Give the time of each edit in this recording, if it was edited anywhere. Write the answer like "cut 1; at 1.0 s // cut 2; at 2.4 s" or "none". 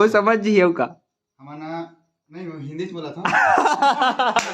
none